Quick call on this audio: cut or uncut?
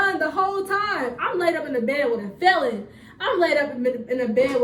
uncut